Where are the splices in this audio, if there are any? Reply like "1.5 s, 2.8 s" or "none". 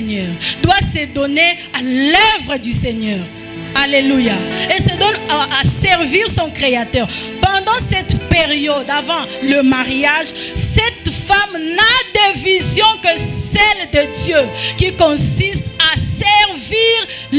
none